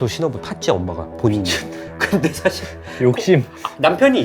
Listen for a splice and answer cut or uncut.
uncut